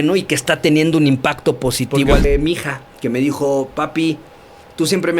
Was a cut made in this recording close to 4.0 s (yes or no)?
no